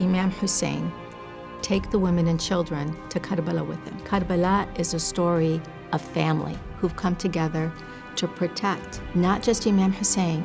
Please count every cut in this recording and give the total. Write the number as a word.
three